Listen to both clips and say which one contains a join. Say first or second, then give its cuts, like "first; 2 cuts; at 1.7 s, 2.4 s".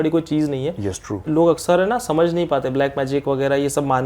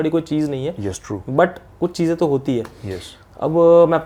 first; 1 cut; at 1.2 s